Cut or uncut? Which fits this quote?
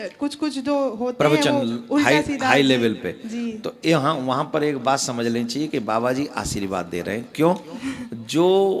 uncut